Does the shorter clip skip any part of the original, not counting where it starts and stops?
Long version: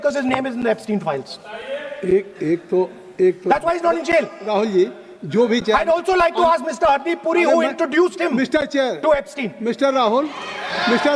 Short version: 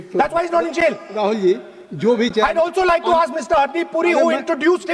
no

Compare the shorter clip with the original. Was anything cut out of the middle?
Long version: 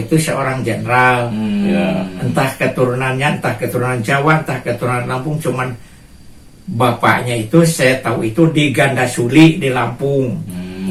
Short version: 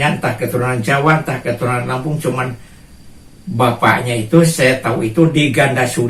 no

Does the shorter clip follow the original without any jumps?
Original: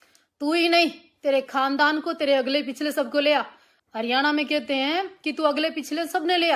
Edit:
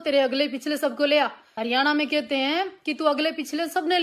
no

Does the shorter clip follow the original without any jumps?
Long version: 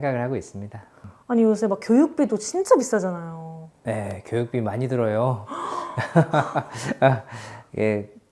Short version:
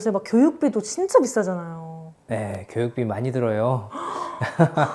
yes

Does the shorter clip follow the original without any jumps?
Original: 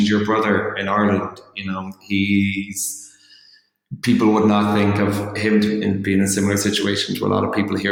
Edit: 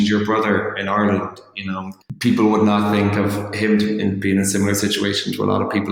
no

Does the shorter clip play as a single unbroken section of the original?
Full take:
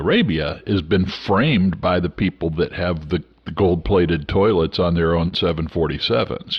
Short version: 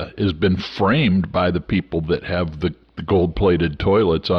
yes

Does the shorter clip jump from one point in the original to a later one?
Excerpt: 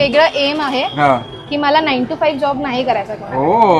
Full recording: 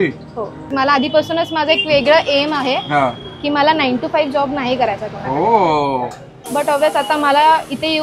no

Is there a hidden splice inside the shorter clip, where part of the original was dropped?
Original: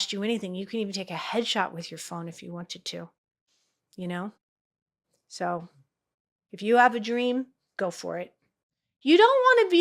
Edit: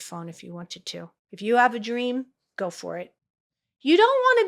yes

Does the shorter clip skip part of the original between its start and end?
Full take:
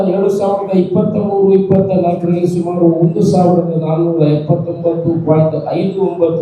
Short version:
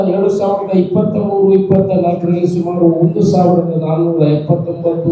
no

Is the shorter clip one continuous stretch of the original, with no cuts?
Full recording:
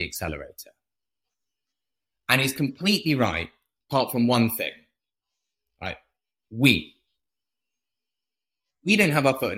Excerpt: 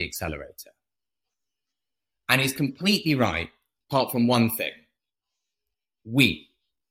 no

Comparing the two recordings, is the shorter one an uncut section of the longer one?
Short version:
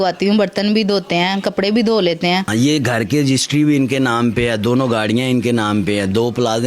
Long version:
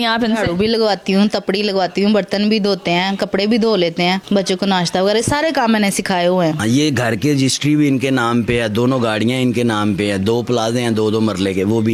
no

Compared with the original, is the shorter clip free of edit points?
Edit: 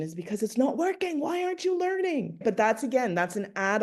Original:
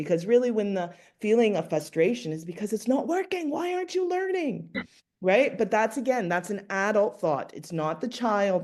no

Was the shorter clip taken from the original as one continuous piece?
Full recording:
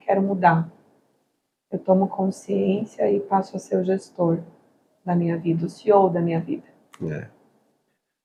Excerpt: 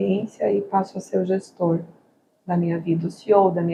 yes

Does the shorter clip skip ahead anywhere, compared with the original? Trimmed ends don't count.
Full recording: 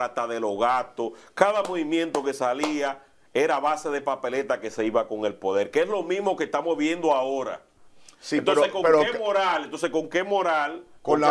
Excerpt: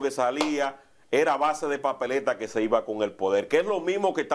no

